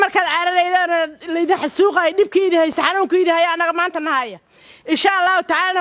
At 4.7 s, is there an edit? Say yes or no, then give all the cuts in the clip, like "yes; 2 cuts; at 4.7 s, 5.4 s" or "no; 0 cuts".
no; 0 cuts